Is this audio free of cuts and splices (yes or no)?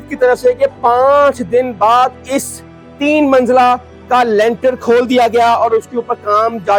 yes